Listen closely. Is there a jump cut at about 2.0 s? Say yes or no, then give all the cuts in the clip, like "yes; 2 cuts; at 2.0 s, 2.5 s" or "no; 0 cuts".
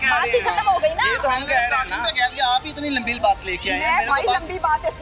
no; 0 cuts